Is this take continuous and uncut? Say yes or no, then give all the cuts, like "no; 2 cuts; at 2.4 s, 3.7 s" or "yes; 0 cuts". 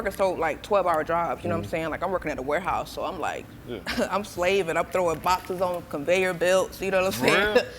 no; 1 cut; at 3.6 s